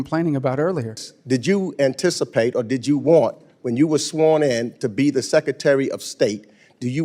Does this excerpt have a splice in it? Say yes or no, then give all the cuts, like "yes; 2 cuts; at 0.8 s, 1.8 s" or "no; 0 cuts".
yes; 1 cut; at 1.1 s